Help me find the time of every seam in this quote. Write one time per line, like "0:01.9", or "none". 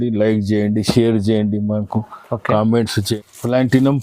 0:03.1